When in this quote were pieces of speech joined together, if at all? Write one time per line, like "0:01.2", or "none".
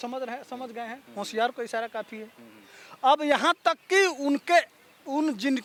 none